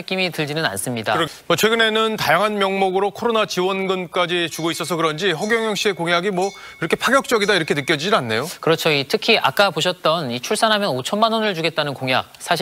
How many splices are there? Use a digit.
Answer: 1